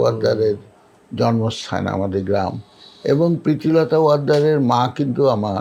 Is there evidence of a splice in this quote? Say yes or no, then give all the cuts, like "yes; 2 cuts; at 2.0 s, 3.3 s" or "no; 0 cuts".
no; 0 cuts